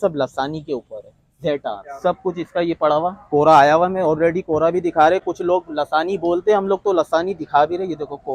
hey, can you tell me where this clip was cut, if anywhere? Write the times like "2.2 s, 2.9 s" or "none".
none

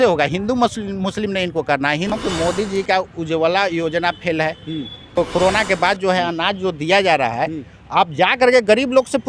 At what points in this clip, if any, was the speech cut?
2.1 s, 5.2 s

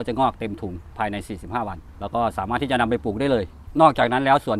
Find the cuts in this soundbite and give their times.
none

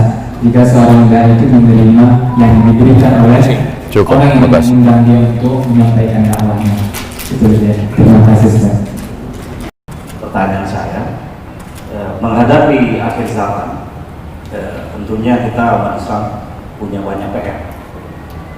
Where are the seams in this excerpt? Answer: 9.9 s

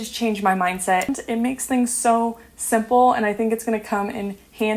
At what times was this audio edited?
1.1 s

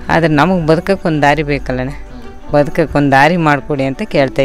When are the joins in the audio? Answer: none

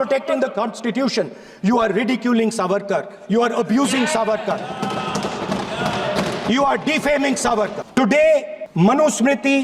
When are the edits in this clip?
7.8 s, 8.6 s

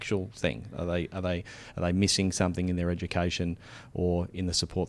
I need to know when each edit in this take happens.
none

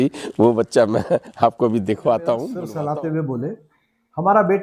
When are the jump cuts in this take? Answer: 2.6 s

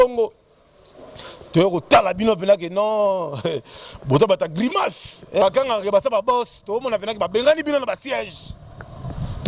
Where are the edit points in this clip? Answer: 5.4 s

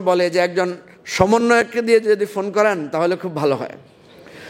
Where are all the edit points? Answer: none

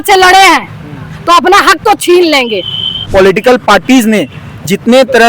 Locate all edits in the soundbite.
2.9 s

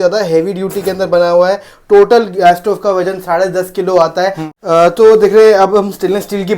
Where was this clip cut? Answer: 4.5 s

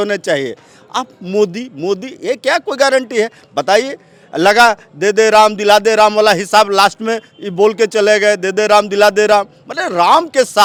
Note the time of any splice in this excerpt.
none

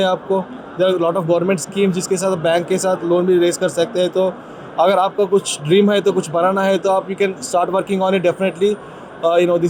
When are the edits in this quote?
none

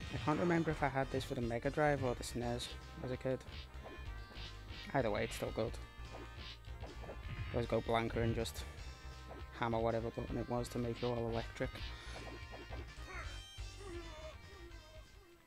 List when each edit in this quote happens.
1.3 s

